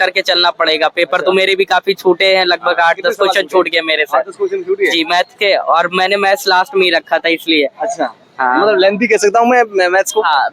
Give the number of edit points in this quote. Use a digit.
0